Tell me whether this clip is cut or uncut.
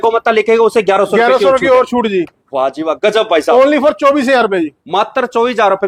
uncut